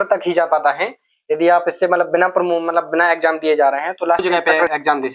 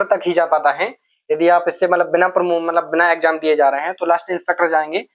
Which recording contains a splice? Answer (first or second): first